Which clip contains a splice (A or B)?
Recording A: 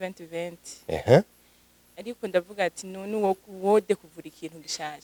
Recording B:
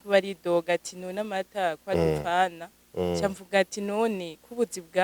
B